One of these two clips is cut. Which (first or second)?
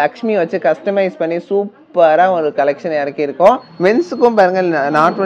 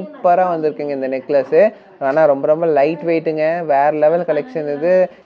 first